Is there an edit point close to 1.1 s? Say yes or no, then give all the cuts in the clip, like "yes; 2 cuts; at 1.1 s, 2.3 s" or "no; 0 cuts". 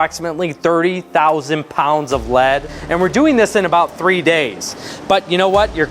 no; 1 cut; at 2.8 s